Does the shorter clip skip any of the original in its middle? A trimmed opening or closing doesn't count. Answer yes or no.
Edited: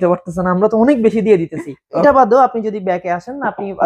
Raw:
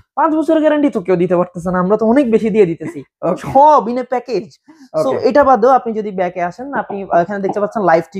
yes